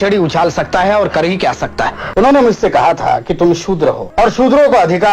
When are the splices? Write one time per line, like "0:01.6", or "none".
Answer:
0:02.0
0:04.0